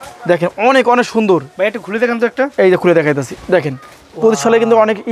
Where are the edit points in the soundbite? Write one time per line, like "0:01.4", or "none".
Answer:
none